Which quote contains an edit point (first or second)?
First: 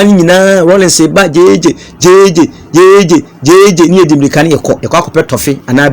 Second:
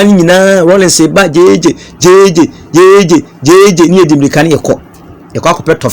first